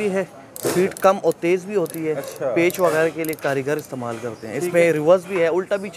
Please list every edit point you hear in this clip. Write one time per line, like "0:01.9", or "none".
none